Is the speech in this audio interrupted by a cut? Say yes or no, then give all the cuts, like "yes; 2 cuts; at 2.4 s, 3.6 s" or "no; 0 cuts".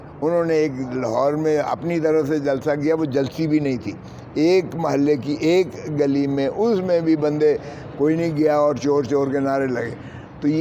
no; 0 cuts